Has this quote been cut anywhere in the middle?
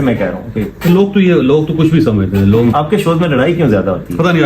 yes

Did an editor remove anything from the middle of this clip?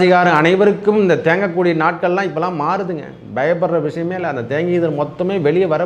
no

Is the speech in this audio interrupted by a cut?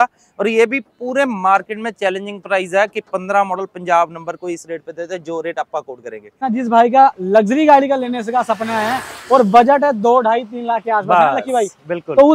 yes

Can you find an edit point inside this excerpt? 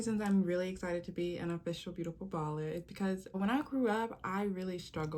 yes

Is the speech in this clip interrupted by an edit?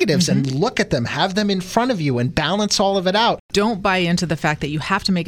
yes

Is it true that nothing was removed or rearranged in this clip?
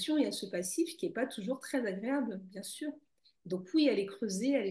yes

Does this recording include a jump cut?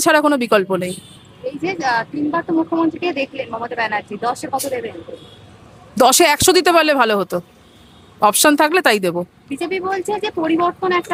no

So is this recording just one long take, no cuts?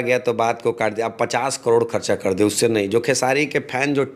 yes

